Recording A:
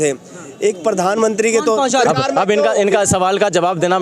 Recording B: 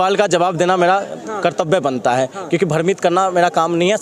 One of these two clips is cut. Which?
A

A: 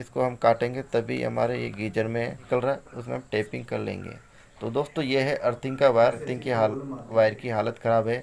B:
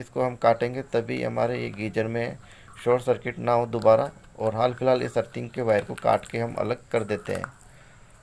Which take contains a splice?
A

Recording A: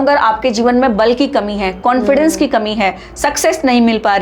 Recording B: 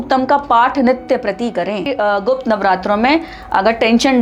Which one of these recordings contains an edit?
B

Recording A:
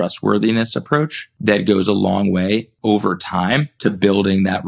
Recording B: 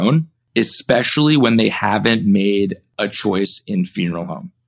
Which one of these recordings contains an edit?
A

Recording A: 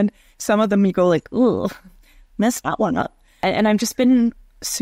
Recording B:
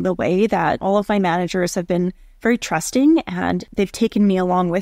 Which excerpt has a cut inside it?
A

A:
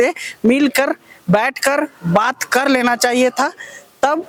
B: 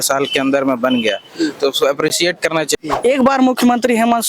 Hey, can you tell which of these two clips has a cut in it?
B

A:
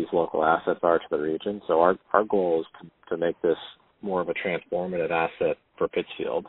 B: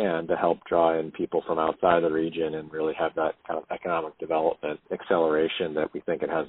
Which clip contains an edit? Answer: B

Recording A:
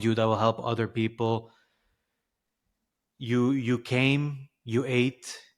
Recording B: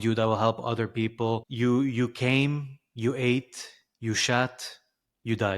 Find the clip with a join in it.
B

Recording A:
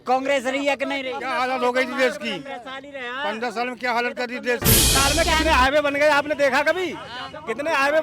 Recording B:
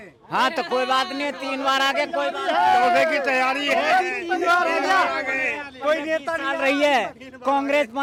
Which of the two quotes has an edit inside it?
A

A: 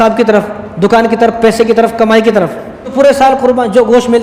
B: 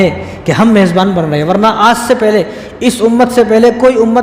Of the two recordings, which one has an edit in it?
A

